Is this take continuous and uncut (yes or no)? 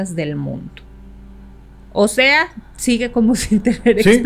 yes